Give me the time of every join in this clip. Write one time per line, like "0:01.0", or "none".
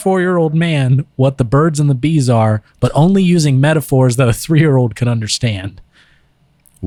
none